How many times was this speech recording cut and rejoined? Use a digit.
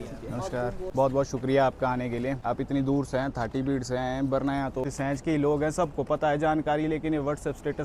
3